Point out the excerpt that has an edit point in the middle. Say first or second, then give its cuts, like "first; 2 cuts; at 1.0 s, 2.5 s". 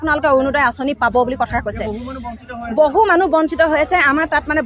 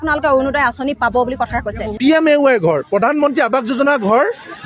second; 1 cut; at 1.9 s